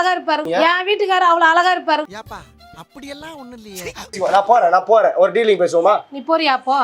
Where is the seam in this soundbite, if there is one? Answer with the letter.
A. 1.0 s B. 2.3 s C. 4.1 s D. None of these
C